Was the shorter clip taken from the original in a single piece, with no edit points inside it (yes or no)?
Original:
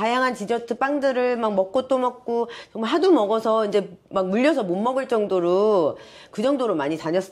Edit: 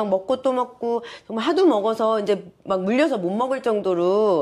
yes